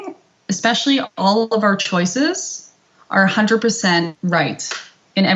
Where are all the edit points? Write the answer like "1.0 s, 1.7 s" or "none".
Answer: 4.1 s